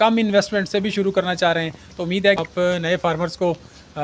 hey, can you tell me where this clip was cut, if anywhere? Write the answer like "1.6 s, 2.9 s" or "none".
2.4 s